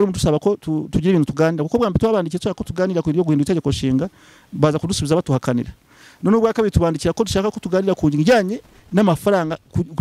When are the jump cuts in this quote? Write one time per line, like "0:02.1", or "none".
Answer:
none